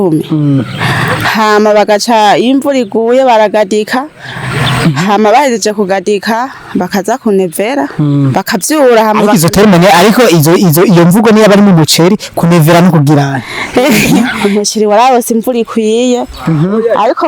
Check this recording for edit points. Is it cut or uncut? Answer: cut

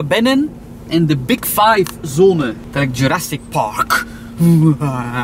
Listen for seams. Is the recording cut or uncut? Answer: cut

